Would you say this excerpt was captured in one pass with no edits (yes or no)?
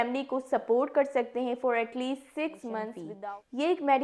no